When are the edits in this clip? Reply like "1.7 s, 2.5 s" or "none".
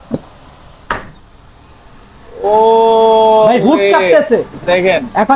none